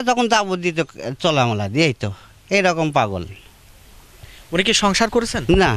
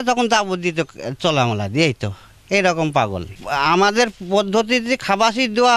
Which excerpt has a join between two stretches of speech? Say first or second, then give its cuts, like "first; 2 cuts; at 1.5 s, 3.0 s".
second; 1 cut; at 3.4 s